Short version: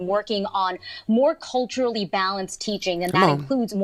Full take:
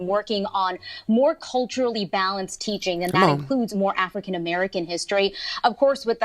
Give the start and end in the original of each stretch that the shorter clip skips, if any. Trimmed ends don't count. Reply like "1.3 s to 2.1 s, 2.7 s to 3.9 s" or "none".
none